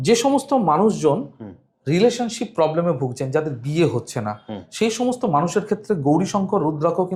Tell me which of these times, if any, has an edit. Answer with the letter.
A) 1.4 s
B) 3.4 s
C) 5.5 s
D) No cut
D